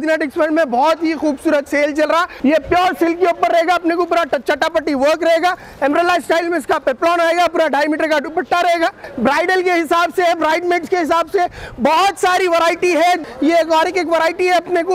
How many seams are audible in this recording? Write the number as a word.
three